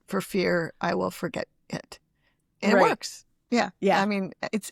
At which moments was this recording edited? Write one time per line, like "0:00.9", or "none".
none